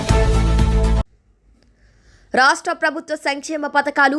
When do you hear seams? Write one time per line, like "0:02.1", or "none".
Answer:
0:01.0